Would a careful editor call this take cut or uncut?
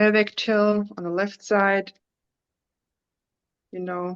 uncut